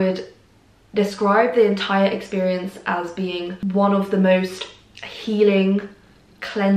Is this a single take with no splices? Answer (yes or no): yes